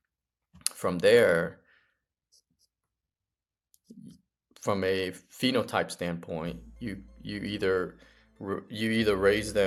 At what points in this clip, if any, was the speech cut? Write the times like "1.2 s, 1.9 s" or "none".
none